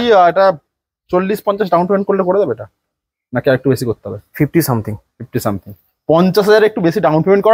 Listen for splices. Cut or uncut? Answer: uncut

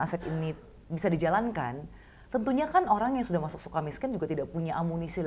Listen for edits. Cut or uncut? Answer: uncut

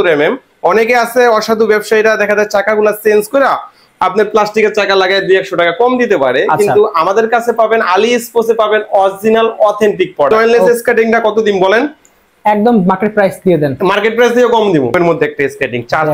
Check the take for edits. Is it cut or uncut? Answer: cut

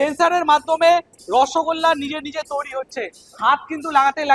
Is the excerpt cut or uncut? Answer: uncut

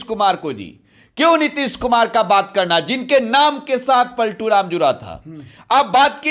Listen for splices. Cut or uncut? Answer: uncut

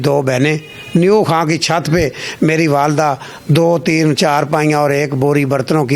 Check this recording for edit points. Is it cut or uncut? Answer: uncut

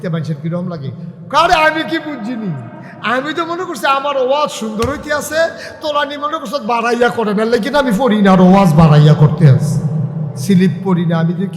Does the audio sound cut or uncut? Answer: cut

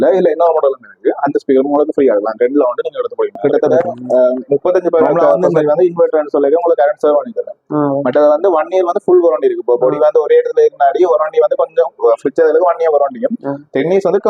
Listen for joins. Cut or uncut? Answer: cut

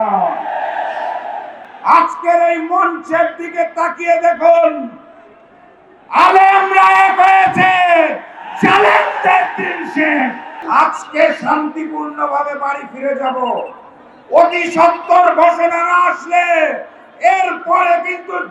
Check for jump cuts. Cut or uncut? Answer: cut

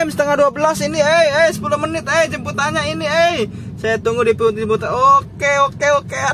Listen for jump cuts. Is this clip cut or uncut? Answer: uncut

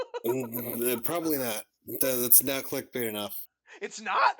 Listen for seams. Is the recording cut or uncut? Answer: cut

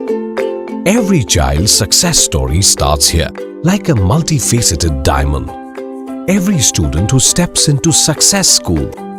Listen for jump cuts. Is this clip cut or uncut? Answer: uncut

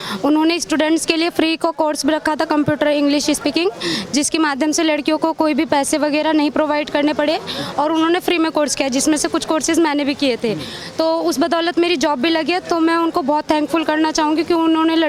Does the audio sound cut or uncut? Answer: uncut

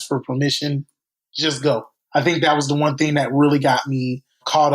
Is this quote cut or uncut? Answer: cut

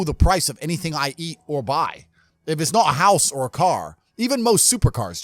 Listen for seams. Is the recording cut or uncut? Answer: uncut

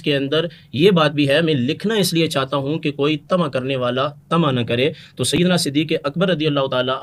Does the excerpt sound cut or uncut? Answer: uncut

